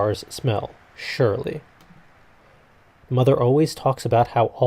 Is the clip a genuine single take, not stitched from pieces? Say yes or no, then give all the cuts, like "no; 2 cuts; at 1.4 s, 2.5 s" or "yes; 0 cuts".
yes; 0 cuts